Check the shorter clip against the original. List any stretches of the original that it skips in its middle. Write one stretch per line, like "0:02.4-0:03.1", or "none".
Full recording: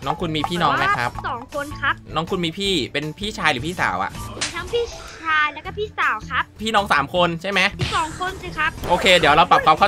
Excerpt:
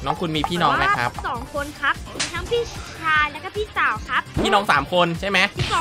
0:02.0-0:04.2